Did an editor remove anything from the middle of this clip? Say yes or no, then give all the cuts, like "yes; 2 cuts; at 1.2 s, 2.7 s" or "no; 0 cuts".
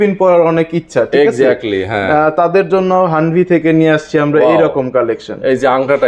no; 0 cuts